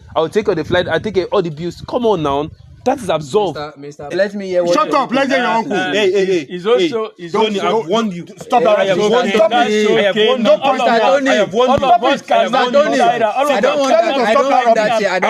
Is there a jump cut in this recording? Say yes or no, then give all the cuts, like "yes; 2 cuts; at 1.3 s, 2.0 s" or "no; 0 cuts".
yes; 1 cut; at 4.1 s